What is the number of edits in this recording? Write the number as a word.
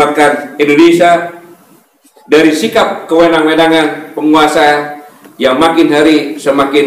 zero